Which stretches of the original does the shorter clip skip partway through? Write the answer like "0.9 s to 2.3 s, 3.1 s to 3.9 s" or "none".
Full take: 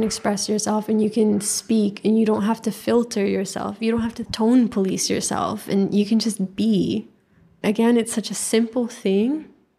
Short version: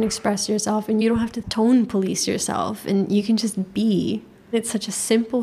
1.0 s to 3.8 s, 7.4 s to 8.0 s